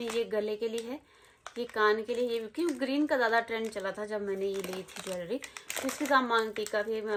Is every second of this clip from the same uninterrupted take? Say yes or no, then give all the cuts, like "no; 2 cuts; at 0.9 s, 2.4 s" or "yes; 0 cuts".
yes; 0 cuts